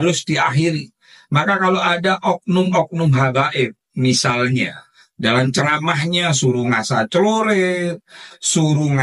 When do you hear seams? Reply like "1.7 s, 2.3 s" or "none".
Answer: none